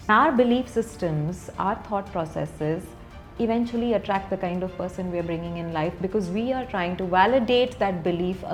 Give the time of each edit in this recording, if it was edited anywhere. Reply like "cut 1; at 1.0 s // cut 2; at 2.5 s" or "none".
none